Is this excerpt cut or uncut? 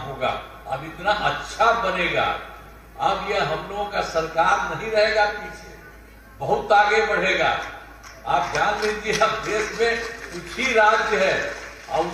uncut